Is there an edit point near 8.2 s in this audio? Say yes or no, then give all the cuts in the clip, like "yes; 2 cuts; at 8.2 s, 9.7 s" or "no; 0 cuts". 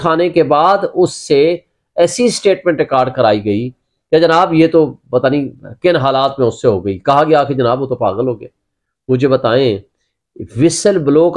no; 0 cuts